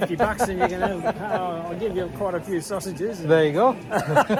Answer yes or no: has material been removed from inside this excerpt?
no